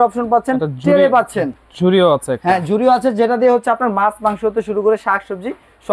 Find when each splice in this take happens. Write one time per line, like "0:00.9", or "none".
none